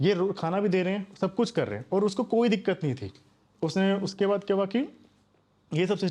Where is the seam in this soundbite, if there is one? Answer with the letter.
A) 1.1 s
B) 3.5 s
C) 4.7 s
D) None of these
D